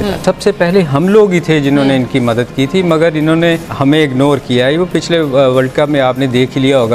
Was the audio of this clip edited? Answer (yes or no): no